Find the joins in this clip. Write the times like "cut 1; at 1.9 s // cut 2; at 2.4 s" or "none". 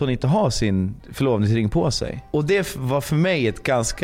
cut 1; at 1.0 s // cut 2; at 2.2 s